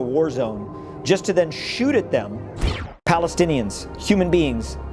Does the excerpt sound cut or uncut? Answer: cut